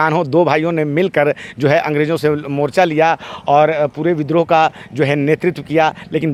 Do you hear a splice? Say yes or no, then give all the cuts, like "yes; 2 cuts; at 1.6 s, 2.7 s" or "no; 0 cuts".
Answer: no; 0 cuts